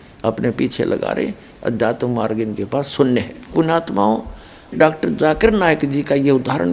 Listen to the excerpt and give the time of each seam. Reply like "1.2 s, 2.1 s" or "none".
3.5 s, 4.7 s